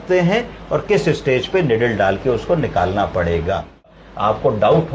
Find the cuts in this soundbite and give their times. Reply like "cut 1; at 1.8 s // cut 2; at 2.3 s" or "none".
cut 1; at 4.0 s